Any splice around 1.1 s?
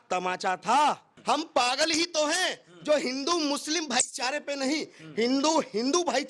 yes; 1 cut; at 1.1 s

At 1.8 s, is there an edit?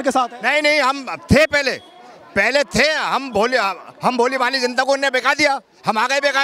no; 0 cuts

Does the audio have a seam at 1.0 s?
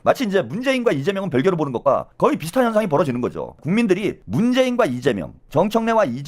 no; 2 cuts; at 4.0 s, 5.3 s

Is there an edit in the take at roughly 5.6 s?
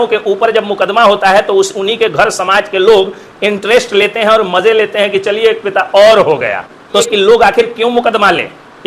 no; 1 cut; at 7.0 s

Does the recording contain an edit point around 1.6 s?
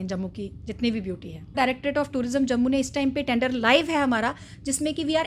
yes; 1 cut; at 1.6 s

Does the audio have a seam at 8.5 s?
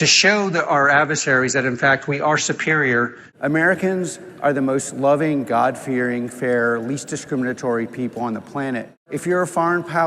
no; 1 cut; at 3.2 s

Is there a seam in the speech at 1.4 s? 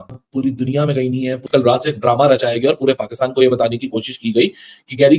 yes; 1 cut; at 1.4 s

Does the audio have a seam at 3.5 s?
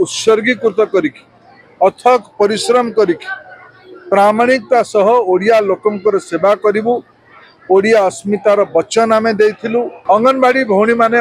no; 1 cut; at 9.9 s

